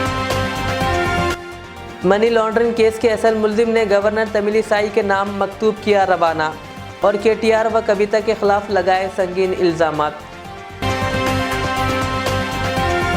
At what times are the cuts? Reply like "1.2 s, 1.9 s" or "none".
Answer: 1.3 s